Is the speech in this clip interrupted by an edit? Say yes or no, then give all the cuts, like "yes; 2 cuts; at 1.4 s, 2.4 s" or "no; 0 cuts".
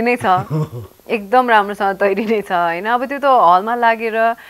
no; 0 cuts